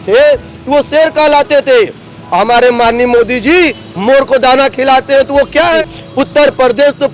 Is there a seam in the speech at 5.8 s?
yes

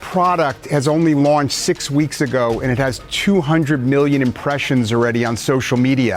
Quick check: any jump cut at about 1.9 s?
no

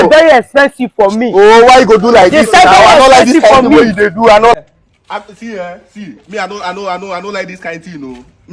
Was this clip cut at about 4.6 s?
yes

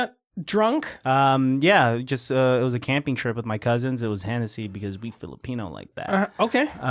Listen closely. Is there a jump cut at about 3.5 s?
no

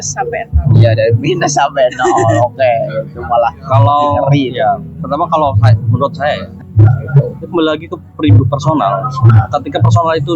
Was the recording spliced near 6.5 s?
yes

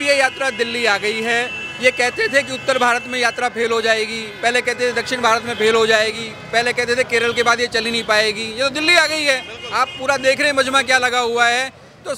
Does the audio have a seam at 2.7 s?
no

